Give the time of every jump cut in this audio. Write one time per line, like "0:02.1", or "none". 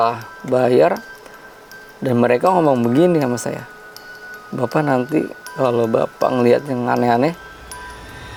none